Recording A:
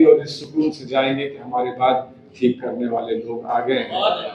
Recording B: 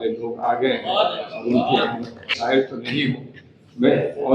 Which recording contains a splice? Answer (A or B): B